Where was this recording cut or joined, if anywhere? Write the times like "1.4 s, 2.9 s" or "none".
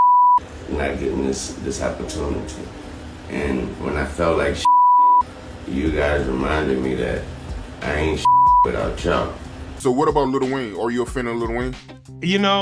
9.6 s